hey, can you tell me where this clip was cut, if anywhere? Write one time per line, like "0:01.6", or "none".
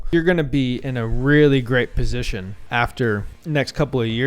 0:02.7
0:03.3